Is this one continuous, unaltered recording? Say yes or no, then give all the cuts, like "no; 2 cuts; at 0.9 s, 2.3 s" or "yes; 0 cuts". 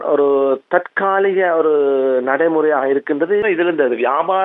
no; 1 cut; at 3.4 s